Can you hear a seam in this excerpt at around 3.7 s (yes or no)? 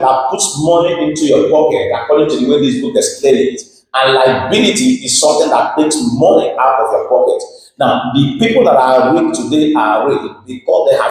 no